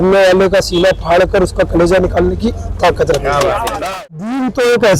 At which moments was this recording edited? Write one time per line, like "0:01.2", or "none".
0:03.8